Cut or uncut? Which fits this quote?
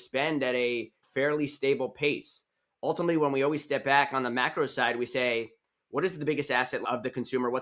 cut